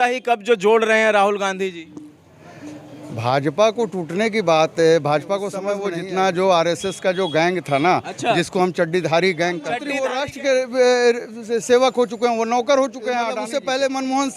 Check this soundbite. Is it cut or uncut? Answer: cut